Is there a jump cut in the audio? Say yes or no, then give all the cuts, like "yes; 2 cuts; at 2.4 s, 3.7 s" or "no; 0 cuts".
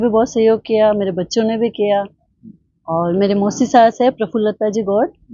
no; 0 cuts